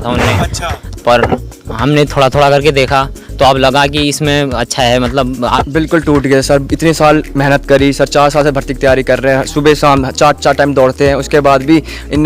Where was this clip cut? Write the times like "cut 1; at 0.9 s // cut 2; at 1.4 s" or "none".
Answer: cut 1; at 5.6 s